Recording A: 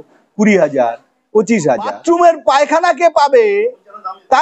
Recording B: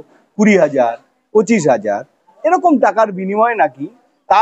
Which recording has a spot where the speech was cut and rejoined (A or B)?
A